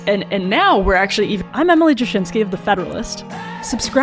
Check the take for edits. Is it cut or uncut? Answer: uncut